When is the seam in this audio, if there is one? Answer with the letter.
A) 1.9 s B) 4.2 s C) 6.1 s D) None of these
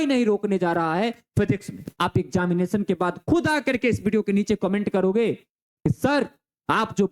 A